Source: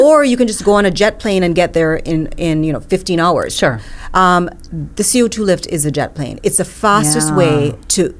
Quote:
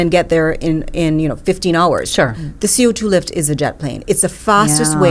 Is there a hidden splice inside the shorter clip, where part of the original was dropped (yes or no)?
yes